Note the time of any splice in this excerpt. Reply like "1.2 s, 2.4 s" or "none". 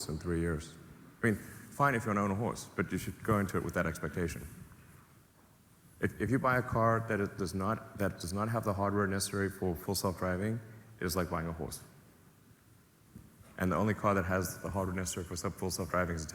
none